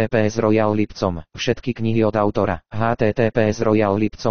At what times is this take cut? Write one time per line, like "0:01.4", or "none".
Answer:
0:01.3